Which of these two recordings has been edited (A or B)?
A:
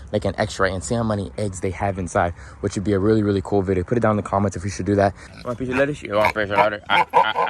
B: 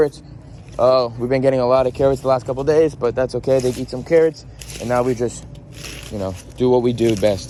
A